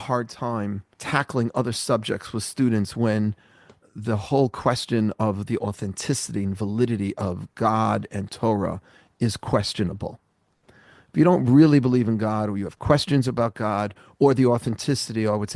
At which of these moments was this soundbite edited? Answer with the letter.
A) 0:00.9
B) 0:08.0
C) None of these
A